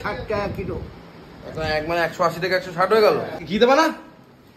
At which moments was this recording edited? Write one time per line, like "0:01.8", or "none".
0:03.4